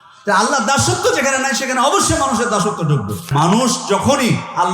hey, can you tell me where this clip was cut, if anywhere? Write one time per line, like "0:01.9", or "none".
0:03.3